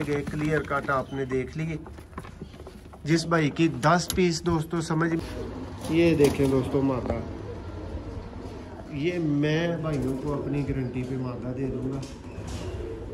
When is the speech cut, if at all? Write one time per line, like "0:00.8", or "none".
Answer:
0:05.2